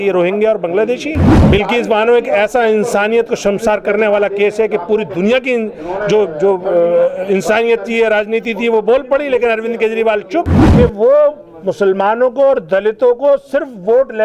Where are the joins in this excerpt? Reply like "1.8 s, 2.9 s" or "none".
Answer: 1.4 s, 10.6 s